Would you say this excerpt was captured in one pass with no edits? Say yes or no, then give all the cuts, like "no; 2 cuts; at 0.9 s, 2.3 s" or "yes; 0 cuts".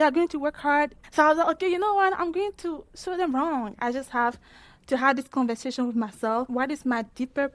no; 2 cuts; at 3.7 s, 6.5 s